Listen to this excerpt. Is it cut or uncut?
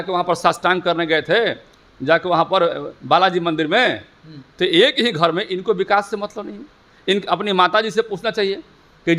uncut